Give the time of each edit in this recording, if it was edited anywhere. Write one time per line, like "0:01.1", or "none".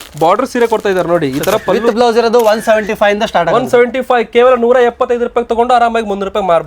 0:01.8

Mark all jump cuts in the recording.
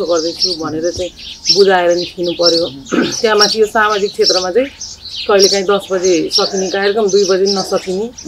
none

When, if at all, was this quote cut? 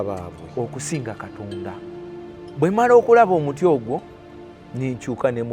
0:02.3

